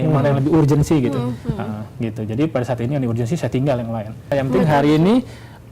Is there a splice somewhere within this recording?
yes; 1 cut; at 4.3 s

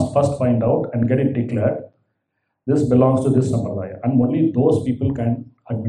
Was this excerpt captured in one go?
yes; 0 cuts

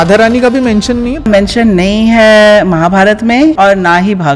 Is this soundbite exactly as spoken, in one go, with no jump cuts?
no; 2 cuts; at 1.3 s, 3.6 s

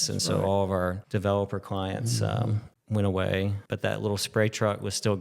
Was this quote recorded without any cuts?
no; 3 cuts; at 1.0 s, 2.7 s, 3.6 s

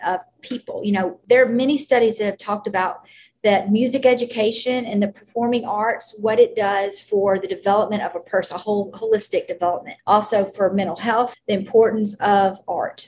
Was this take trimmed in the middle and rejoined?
yes; 3 cuts; at 1.2 s, 9.9 s, 11.4 s

